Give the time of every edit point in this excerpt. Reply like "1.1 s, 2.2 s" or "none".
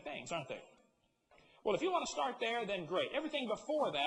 2.2 s

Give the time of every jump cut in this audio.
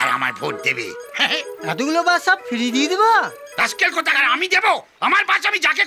none

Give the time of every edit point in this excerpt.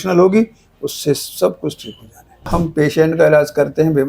2.5 s

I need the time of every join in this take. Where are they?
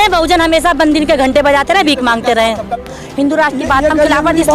2.8 s

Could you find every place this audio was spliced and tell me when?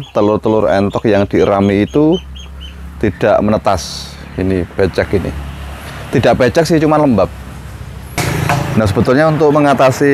8.2 s

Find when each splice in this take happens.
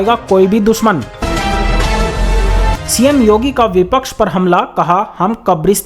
1.2 s, 2.9 s

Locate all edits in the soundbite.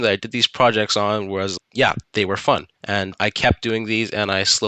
1.6 s, 2.8 s

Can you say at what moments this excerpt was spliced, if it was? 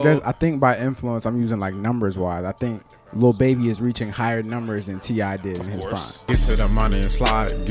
6.1 s

